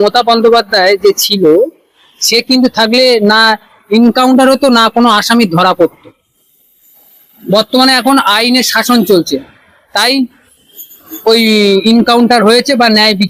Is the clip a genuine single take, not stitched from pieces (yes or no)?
yes